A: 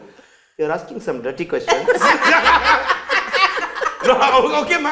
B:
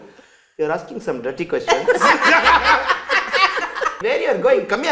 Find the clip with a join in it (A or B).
B